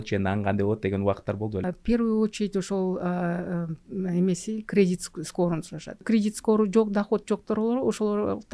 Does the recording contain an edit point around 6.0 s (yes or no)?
yes